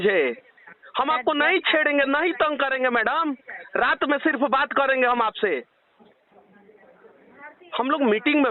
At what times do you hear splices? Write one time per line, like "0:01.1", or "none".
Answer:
none